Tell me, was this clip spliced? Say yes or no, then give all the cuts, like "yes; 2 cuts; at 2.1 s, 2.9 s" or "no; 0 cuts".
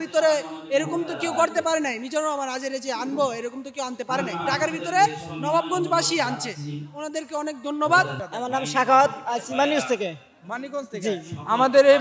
yes; 1 cut; at 8.2 s